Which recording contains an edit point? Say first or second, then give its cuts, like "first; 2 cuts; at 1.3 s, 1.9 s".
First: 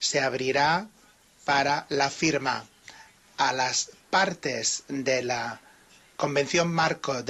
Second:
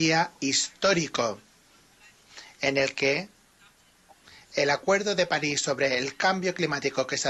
first; 1 cut; at 1.6 s